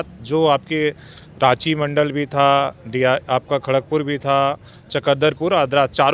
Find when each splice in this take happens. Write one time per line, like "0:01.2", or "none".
none